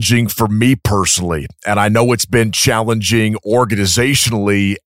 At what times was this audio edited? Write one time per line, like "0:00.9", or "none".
none